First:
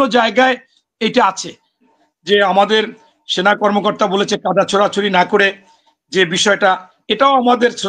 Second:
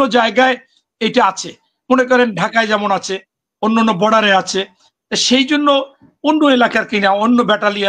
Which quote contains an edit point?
first; 1 cut; at 1.8 s

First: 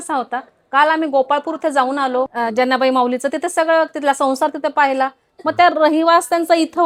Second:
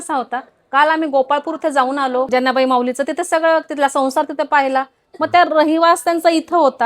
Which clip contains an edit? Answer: second; 1 cut; at 2.3 s

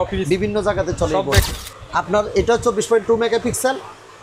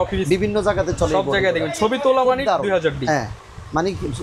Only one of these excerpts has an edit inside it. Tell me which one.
first; 1 cut; at 1.4 s

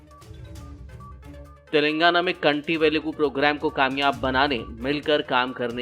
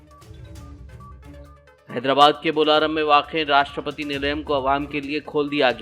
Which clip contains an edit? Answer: second; 1 cut; at 1.3 s

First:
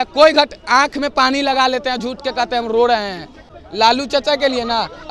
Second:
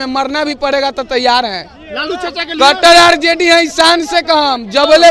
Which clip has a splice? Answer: first; 1 cut; at 3.4 s

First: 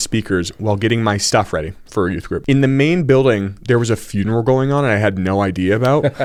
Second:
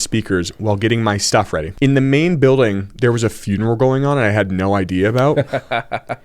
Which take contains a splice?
second; 1 cut; at 1.7 s

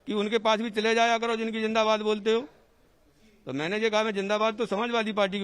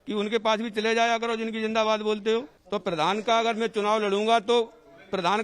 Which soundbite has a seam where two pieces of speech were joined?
second; 1 cut; at 2.6 s

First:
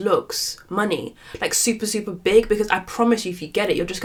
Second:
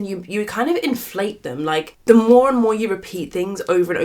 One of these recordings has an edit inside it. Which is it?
second; 1 cut; at 1.9 s

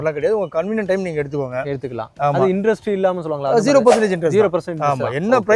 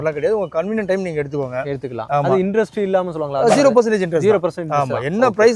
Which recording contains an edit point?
second; 1 cut; at 2.0 s

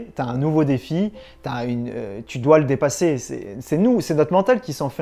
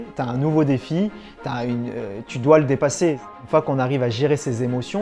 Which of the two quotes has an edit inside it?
second; 1 cut; at 3.3 s

